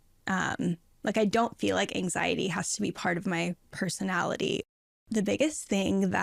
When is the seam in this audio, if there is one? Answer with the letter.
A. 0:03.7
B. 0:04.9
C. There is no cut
B